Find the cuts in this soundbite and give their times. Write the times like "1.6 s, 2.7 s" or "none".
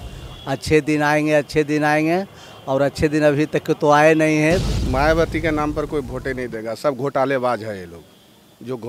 4.8 s